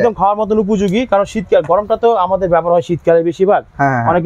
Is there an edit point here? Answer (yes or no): no